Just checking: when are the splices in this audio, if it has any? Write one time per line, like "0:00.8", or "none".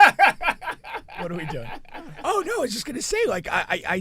0:02.1